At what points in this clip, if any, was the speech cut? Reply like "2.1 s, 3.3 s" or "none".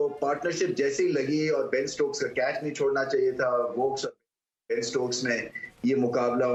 none